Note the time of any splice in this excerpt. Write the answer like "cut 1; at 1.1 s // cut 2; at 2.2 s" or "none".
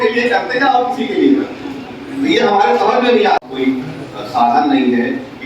cut 1; at 3.4 s